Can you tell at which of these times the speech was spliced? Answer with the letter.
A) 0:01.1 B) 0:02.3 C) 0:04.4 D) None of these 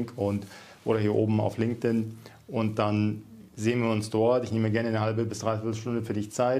D